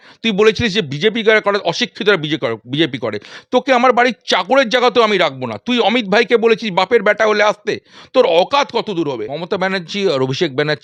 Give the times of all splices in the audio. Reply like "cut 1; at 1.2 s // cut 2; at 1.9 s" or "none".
cut 1; at 9.3 s

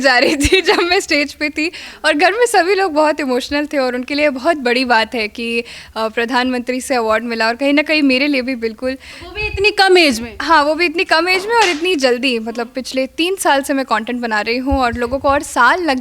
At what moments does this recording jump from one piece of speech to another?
none

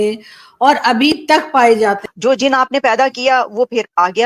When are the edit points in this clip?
cut 1; at 2.0 s

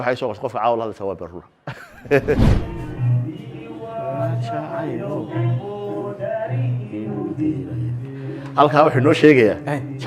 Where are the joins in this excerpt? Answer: cut 1; at 2.5 s

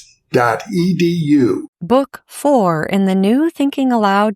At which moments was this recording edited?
cut 1; at 1.7 s

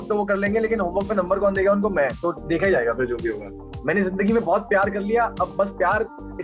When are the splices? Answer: cut 1; at 3.5 s

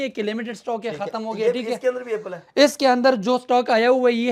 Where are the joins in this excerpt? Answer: none

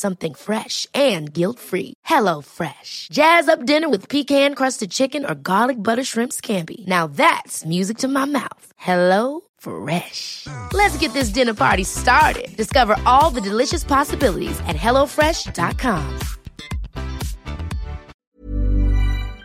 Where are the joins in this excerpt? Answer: cut 1; at 18.2 s

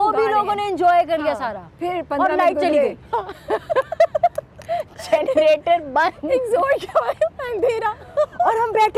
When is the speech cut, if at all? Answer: none

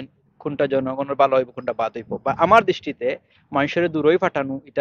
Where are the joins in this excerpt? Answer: none

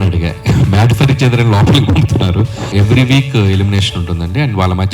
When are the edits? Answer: cut 1; at 2.6 s

